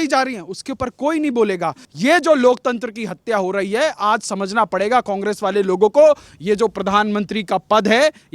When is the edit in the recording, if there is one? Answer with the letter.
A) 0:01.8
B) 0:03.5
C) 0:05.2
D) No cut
A